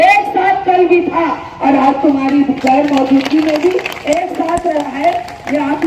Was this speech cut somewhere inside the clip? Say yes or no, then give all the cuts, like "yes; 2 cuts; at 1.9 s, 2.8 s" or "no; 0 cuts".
no; 0 cuts